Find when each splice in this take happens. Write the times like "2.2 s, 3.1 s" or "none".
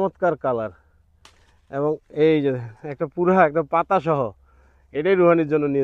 none